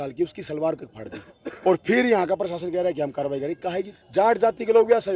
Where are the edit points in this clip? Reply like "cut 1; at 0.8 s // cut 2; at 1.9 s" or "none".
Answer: cut 1; at 3.9 s

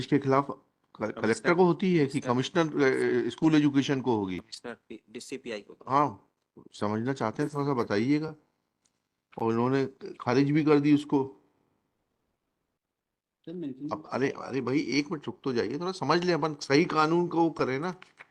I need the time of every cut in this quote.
none

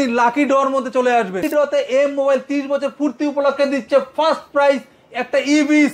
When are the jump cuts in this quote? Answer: cut 1; at 1.4 s

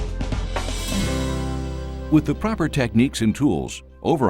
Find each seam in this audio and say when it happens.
cut 1; at 2.0 s

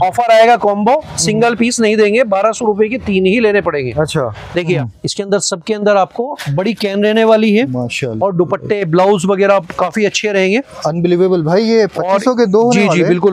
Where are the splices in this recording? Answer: cut 1; at 4.8 s

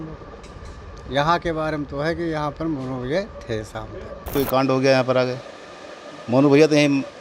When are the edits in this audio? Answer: cut 1; at 4.2 s

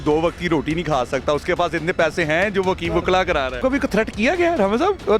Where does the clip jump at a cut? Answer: cut 1; at 3.6 s

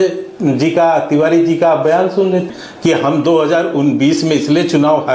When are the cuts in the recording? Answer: cut 1; at 2.6 s

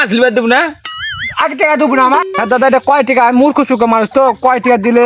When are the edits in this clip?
cut 1; at 2.3 s

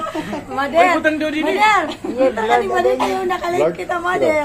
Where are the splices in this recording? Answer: none

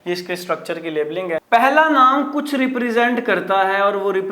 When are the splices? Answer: cut 1; at 1.5 s

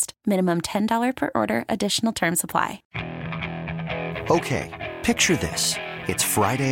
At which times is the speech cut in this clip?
cut 1; at 2.8 s

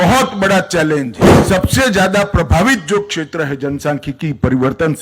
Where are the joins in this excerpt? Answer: cut 1; at 1.3 s

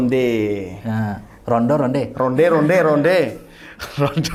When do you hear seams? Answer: none

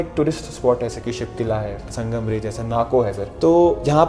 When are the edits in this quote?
cut 1; at 0.9 s

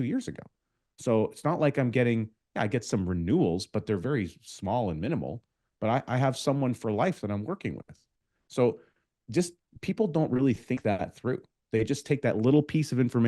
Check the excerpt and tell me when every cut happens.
none

